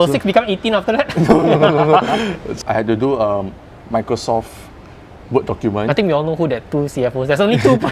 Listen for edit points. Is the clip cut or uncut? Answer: cut